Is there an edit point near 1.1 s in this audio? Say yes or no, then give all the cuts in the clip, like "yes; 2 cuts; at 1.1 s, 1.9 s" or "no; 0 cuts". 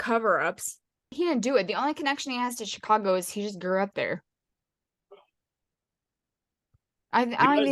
yes; 1 cut; at 1.1 s